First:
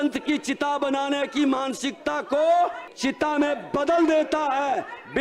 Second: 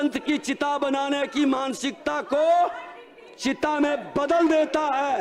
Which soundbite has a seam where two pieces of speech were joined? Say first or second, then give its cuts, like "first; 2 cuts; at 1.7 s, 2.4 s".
first; 1 cut; at 2.9 s